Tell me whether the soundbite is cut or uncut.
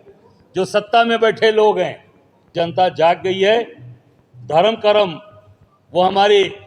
cut